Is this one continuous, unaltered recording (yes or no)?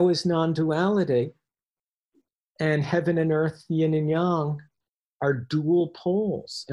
yes